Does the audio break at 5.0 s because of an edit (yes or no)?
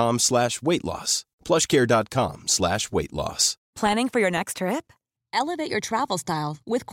no